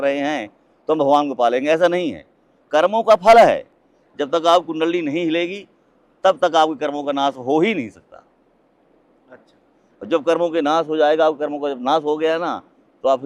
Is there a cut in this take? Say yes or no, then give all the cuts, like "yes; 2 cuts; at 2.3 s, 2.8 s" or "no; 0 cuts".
yes; 1 cut; at 3.7 s